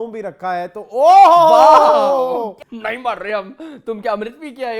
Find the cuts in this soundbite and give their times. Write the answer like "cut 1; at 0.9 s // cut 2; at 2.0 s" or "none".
cut 1; at 2.6 s